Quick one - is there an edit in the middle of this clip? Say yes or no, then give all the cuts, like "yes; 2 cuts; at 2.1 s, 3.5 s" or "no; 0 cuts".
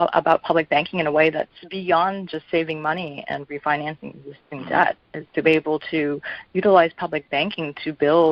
yes; 1 cut; at 1.7 s